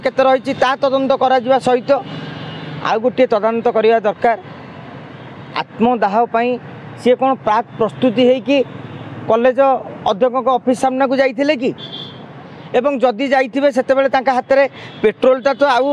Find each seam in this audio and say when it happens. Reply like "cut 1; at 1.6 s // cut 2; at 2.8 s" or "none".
none

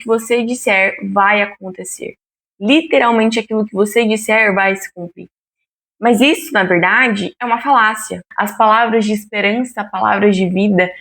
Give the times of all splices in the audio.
cut 1; at 8.2 s

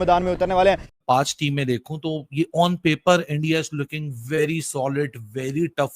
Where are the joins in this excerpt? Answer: cut 1; at 0.9 s

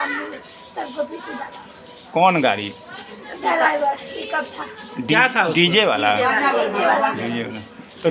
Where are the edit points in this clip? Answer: none

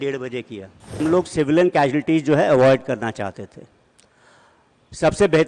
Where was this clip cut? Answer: cut 1; at 1.0 s

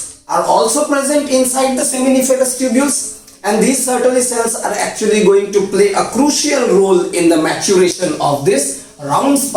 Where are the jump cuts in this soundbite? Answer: none

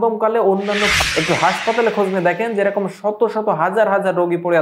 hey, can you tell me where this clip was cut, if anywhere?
cut 1; at 1.0 s

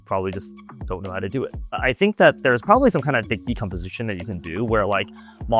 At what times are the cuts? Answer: cut 1; at 1.8 s

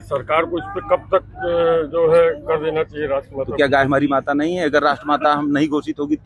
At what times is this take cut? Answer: cut 1; at 3.5 s

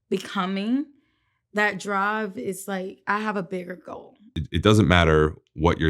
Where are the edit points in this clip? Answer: cut 1; at 4.4 s

